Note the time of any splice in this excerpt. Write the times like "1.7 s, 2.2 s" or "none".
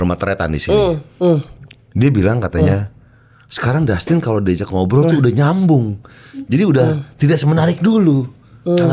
none